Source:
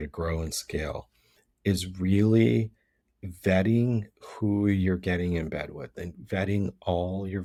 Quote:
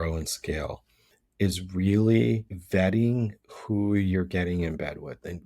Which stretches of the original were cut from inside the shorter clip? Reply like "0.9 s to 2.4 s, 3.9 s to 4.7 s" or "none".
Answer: 2.8 s to 3.3 s